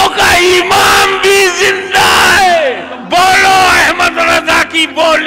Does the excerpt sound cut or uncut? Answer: cut